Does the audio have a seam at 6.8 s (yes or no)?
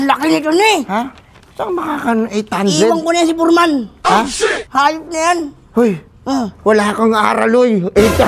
no